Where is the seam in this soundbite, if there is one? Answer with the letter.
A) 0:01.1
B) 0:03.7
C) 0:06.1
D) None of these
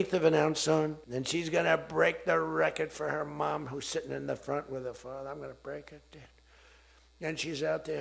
A